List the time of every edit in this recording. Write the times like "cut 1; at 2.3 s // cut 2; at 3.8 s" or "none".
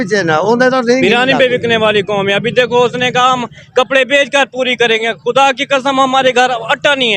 cut 1; at 1.0 s